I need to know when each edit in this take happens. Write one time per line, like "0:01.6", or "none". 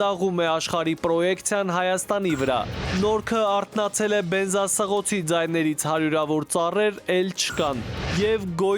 0:02.8